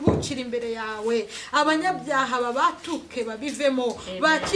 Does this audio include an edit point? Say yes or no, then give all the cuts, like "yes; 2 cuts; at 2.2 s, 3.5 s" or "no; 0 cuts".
no; 0 cuts